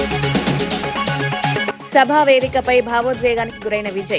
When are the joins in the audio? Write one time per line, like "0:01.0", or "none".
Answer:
0:01.6